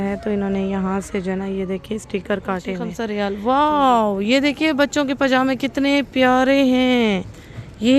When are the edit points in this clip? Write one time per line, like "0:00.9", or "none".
0:03.0